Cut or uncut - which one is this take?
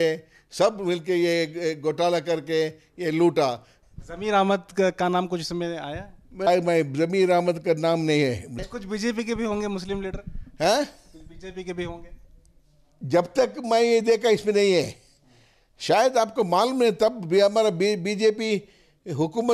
cut